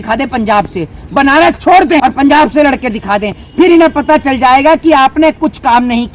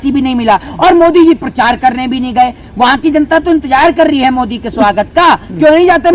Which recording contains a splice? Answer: first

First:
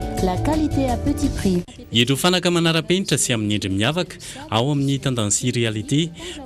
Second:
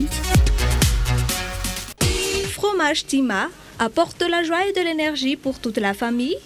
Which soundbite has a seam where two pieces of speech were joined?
second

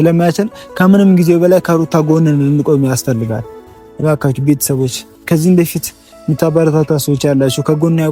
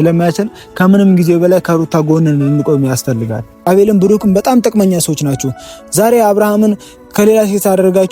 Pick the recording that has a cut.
second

